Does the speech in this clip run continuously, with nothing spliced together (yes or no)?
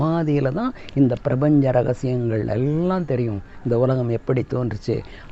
yes